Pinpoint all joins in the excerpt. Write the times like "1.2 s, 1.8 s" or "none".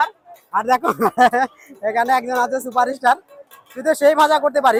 none